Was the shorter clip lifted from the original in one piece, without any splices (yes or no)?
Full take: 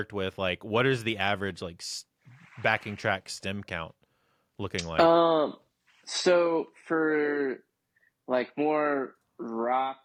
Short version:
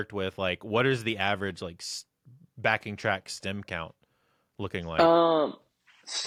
yes